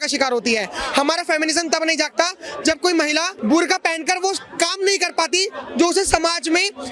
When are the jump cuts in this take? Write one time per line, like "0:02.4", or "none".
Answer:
0:03.3